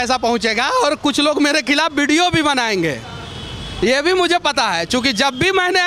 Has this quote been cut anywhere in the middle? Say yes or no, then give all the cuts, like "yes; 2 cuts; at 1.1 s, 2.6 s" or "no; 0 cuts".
no; 0 cuts